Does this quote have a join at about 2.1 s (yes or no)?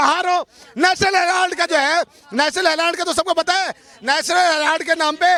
no